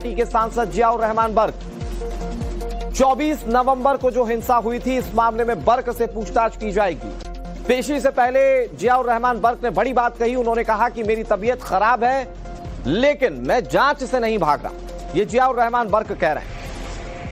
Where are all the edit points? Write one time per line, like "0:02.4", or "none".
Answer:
0:05.8

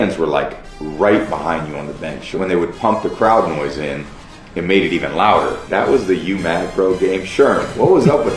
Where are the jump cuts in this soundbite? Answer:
0:02.3
0:05.6

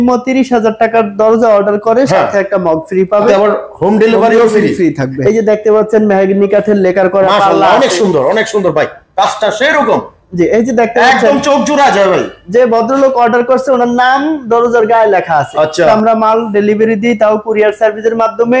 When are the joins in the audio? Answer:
0:03.3
0:05.1
0:15.9

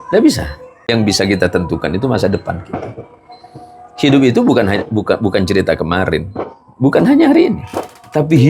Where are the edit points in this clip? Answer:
0:00.9

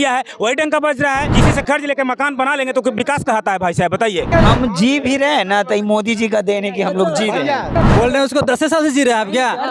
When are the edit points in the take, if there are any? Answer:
0:01.3
0:04.3
0:07.7

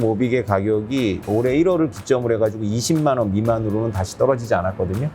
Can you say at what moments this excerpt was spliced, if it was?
0:01.3

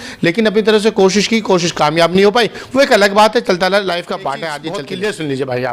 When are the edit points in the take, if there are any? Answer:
0:04.5

